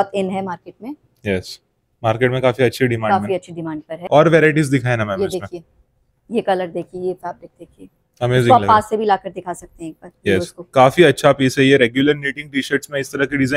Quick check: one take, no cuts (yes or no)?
no